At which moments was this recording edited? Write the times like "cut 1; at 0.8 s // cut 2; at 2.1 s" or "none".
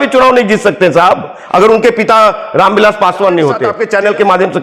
cut 1; at 3.7 s